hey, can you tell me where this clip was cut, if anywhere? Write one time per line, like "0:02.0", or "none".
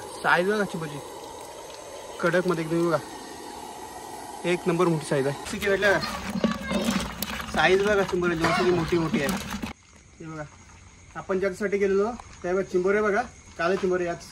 0:05.5
0:09.7